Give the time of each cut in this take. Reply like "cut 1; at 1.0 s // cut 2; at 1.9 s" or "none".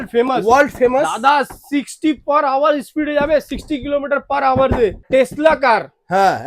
cut 1; at 5.1 s